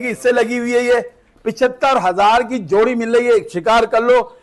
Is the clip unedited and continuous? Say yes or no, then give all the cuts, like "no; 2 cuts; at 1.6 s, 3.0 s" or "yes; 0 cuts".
yes; 0 cuts